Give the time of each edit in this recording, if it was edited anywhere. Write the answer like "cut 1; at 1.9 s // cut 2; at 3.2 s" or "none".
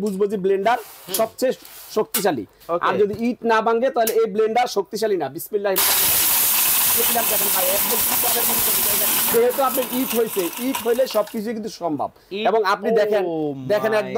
cut 1; at 9.3 s